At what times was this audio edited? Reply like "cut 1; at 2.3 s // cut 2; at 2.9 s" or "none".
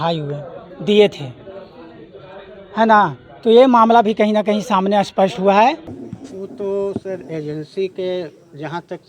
cut 1; at 6.0 s